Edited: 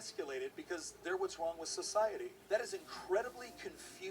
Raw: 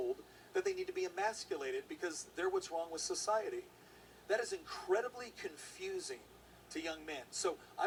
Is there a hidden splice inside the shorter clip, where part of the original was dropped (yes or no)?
yes